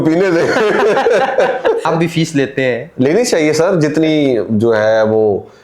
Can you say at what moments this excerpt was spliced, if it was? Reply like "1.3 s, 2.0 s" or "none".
1.9 s